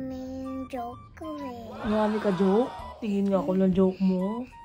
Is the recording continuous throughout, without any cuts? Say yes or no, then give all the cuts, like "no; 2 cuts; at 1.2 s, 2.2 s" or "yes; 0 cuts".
no; 1 cut; at 3.0 s